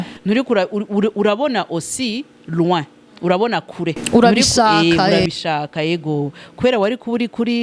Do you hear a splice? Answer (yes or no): no